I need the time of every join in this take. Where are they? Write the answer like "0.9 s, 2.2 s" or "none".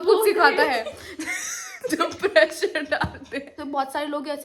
3.5 s